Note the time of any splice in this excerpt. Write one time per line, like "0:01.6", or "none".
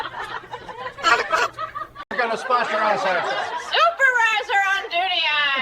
0:02.1